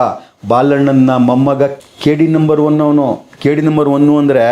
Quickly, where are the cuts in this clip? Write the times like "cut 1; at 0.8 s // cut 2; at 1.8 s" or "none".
cut 1; at 1.8 s

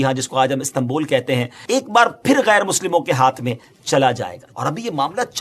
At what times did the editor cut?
cut 1; at 1.5 s // cut 2; at 4.4 s

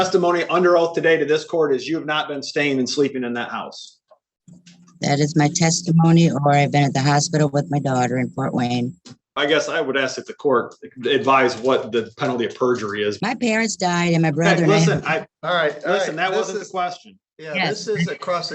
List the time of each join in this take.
cut 1; at 9.3 s // cut 2; at 13.2 s

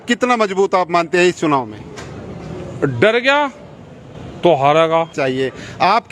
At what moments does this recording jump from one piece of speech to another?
cut 1; at 5.2 s

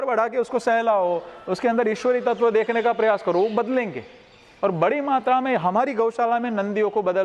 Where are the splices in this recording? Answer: none

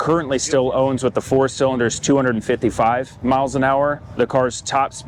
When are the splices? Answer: none

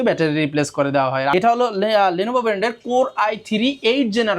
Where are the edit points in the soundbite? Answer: cut 1; at 1.3 s

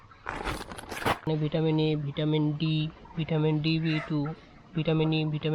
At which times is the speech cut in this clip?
cut 1; at 1.3 s

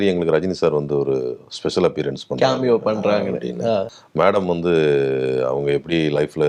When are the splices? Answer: cut 1; at 4.0 s

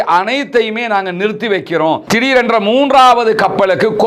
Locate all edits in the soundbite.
cut 1; at 2.0 s

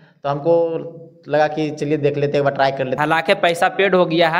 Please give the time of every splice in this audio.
cut 1; at 3.0 s

